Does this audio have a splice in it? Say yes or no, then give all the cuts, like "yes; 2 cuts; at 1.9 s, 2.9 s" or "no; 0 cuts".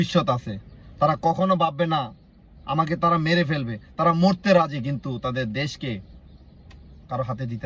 no; 0 cuts